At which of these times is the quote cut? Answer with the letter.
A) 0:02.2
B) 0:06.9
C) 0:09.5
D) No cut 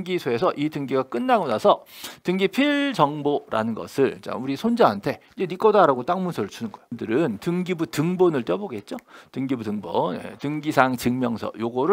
B